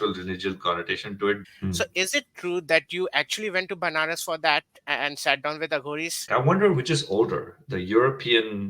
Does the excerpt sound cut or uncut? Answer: cut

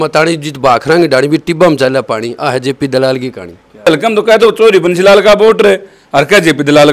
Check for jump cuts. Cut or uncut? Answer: cut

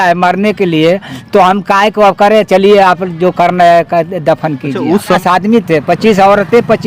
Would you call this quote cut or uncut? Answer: cut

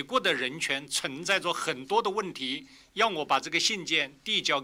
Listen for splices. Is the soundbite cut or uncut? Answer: uncut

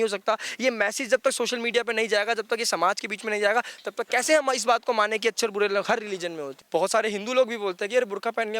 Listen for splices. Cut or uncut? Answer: cut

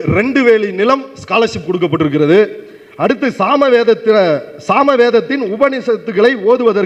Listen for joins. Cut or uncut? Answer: uncut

